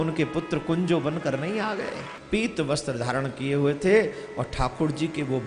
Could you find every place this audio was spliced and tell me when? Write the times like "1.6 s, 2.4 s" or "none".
2.1 s